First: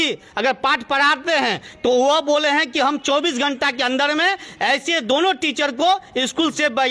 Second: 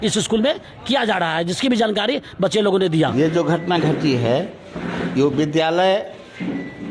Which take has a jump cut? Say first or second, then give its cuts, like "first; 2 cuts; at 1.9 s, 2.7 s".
second; 1 cut; at 3.1 s